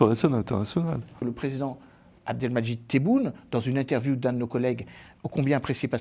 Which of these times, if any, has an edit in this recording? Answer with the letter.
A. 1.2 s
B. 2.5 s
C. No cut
A